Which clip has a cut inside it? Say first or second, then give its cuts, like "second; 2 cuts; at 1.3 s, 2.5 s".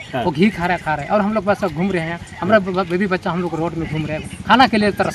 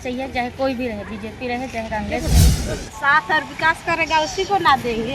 second; 1 cut; at 2.6 s